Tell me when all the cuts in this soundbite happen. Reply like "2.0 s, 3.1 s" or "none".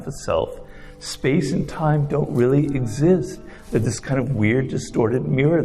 none